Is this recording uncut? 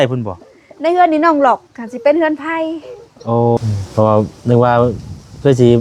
no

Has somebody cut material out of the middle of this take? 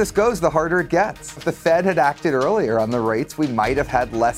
yes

